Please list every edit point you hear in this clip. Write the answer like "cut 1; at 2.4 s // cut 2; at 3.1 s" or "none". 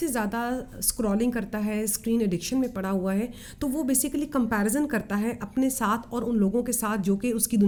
none